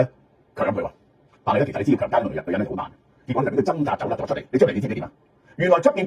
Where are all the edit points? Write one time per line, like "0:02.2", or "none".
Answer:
none